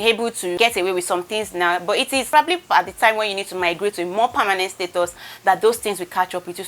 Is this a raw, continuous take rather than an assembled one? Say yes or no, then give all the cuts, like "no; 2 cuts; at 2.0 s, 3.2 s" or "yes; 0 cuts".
yes; 0 cuts